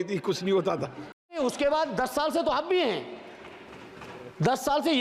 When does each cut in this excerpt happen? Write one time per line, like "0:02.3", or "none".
0:01.4